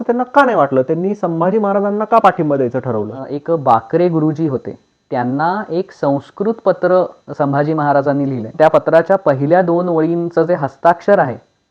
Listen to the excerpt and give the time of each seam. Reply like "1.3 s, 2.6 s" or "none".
3.3 s, 8.5 s